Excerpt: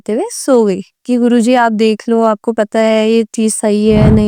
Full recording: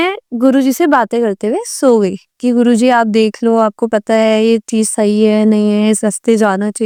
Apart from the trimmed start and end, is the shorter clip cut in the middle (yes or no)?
no